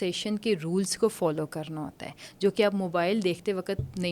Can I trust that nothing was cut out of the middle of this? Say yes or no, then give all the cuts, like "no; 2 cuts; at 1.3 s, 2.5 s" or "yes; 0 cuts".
yes; 0 cuts